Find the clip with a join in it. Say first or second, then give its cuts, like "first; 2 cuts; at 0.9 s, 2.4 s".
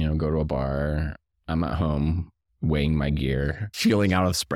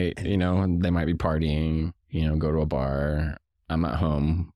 first; 1 cut; at 3.7 s